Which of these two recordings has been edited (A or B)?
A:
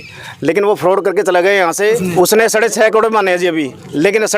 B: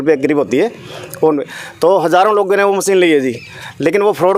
A